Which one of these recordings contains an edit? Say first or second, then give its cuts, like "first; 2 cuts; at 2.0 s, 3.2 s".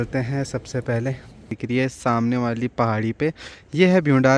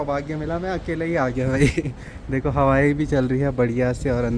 first; 1 cut; at 1.6 s